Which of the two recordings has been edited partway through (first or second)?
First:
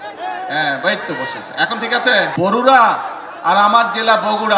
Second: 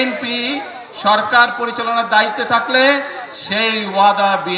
first